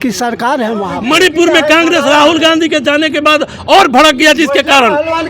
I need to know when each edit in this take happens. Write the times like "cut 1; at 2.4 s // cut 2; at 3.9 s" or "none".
cut 1; at 0.9 s